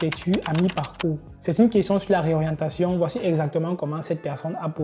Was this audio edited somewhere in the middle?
yes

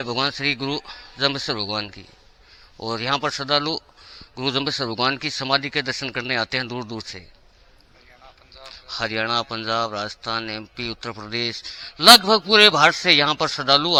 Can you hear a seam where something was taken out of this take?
no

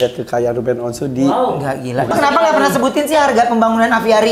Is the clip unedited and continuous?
no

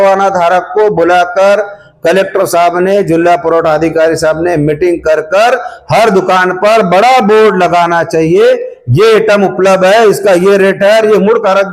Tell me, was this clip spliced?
no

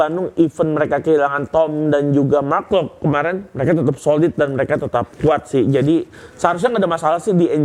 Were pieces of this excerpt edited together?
no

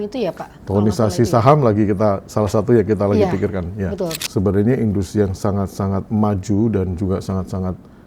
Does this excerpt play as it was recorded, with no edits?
no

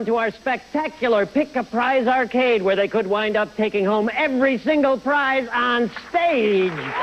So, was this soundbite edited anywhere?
no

